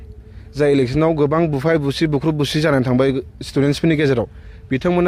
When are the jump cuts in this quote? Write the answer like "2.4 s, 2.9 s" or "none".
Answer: none

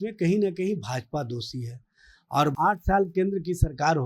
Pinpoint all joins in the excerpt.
2.5 s

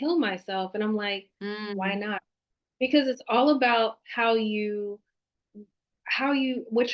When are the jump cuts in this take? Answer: none

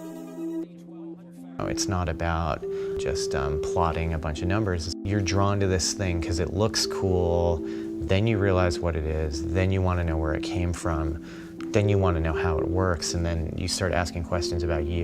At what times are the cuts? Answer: 3.8 s

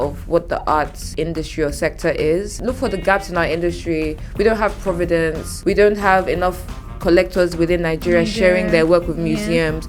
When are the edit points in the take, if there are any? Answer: 1.0 s, 2.6 s, 5.5 s

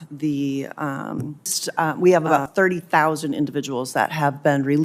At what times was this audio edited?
1.6 s

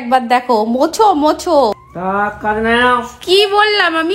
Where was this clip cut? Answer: 1.8 s

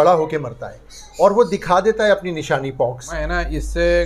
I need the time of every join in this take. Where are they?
3.1 s

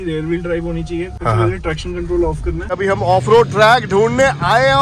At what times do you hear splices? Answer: 1.1 s, 2.7 s

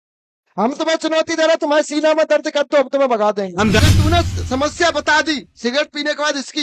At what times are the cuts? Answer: 3.8 s

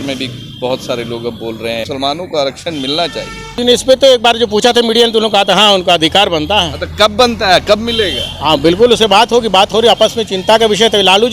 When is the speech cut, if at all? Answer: 1.8 s, 3.6 s

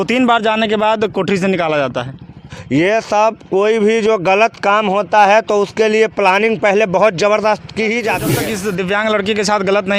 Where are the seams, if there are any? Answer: 2.5 s, 8.3 s

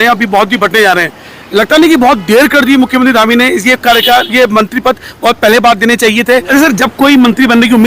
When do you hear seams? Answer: 6.5 s

